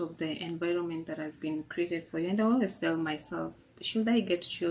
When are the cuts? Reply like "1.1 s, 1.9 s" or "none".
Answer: none